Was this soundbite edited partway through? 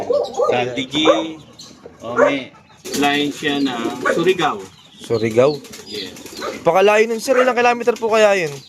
yes; 1 cut; at 2.8 s

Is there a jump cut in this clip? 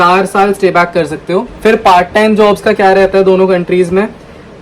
yes; 1 cut; at 1.5 s

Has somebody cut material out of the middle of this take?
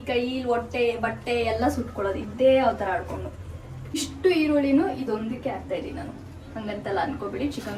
yes; 1 cut; at 4.1 s

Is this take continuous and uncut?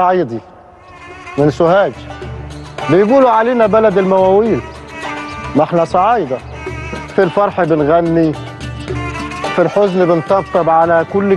yes; 0 cuts

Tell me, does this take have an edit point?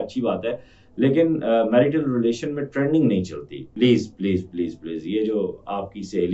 yes; 1 cut; at 3.7 s

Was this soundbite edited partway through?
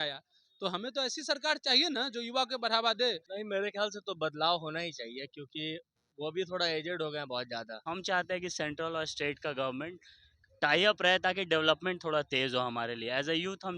yes; 2 cuts; at 3.3 s, 7.8 s

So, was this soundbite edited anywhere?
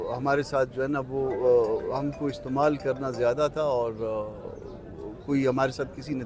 no; 0 cuts

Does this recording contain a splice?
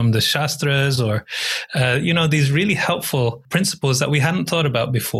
no; 0 cuts

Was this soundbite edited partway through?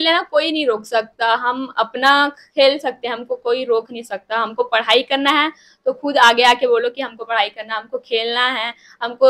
no; 0 cuts

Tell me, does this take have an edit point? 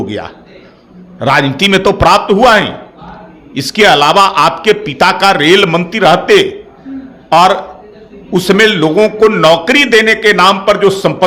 no; 0 cuts

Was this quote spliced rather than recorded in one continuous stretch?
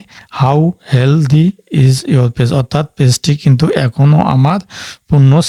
no; 0 cuts

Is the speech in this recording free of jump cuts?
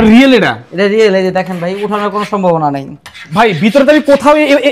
yes; 0 cuts

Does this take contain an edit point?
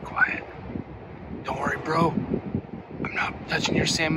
no; 0 cuts

